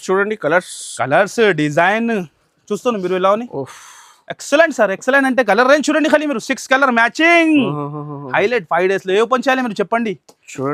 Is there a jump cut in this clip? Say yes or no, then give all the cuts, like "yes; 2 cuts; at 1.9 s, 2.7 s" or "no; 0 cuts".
no; 0 cuts